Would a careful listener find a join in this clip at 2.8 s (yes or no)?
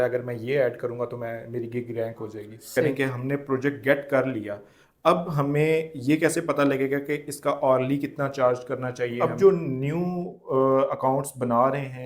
yes